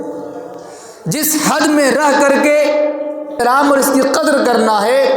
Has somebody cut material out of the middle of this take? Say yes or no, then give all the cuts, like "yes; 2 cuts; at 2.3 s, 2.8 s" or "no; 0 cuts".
yes; 1 cut; at 3.4 s